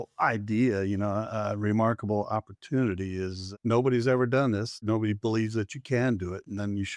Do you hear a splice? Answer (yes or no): yes